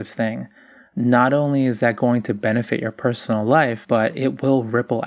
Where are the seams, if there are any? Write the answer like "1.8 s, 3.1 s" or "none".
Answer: 3.8 s